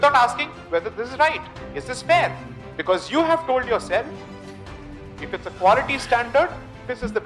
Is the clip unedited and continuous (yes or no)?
yes